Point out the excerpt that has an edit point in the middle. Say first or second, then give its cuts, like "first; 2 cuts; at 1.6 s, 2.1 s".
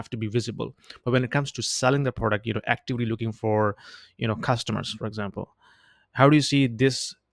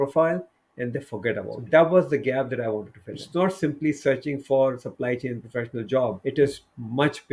second; 3 cuts; at 1.5 s, 3.2 s, 6.2 s